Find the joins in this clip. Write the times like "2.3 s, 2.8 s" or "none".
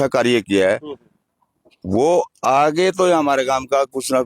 none